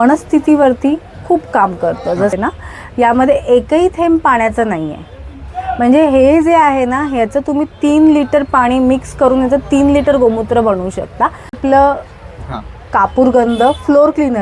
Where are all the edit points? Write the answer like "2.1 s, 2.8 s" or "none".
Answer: 2.3 s, 11.5 s